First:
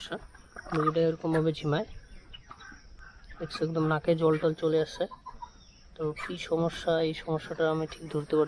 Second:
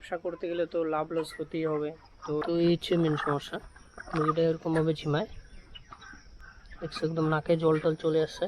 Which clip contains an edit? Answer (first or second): second